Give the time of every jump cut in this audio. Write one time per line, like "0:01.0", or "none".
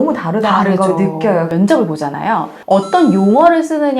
0:01.5
0:02.5